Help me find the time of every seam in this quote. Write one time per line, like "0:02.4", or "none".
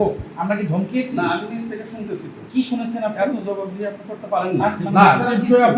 0:04.8